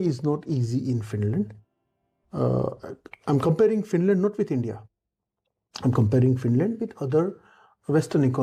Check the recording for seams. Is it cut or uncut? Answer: uncut